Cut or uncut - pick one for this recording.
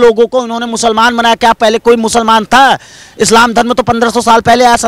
uncut